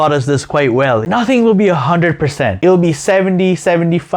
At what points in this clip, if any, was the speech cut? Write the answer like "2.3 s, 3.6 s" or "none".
1.0 s, 2.6 s